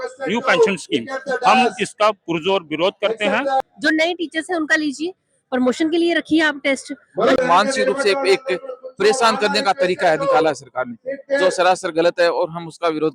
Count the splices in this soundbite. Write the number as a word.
two